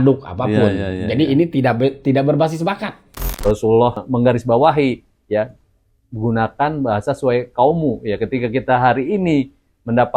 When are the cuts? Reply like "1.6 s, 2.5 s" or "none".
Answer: 3.2 s, 4.0 s